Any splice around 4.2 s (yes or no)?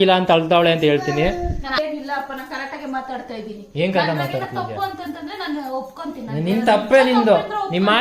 no